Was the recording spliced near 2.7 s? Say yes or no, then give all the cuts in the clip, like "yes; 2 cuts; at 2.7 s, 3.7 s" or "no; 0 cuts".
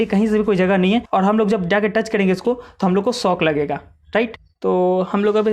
no; 2 cuts; at 1.1 s, 4.4 s